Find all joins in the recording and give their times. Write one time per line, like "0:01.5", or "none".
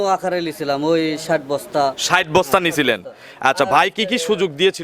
none